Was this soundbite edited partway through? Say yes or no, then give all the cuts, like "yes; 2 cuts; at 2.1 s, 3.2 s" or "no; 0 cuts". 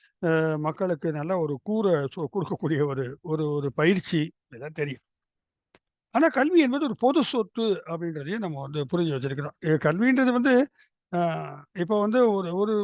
no; 0 cuts